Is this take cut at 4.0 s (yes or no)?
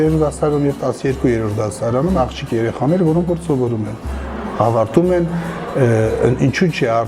no